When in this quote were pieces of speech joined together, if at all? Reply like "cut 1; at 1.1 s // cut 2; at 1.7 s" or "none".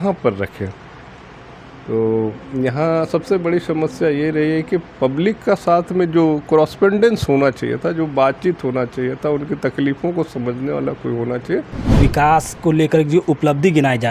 cut 1; at 12.0 s